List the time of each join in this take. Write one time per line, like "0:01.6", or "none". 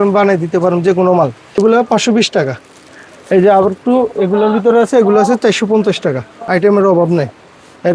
0:01.4
0:06.4